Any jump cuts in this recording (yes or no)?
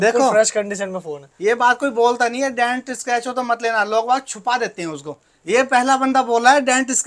no